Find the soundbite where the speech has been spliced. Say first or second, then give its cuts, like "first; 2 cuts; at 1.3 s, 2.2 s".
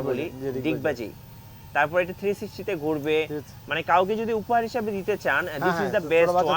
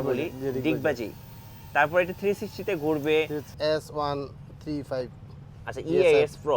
second; 1 cut; at 3.5 s